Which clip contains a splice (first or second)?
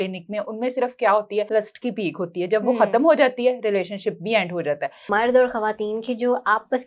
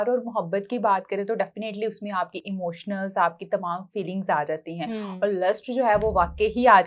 first